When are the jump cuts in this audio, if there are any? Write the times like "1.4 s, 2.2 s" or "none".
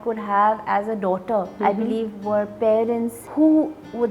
1.5 s, 3.2 s